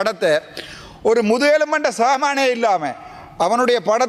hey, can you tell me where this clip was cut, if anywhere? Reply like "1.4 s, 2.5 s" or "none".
none